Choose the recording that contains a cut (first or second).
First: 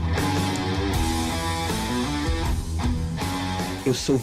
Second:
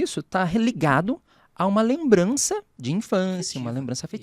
second